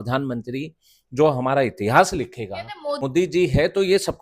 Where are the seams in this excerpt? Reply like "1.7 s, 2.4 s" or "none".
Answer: 3.0 s